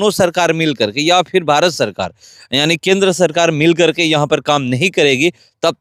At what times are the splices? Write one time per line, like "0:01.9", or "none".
none